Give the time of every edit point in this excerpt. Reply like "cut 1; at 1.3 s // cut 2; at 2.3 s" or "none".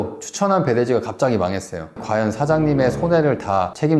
cut 1; at 2.0 s